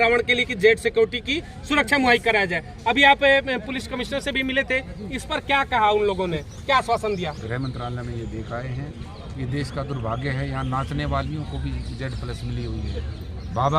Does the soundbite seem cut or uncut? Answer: cut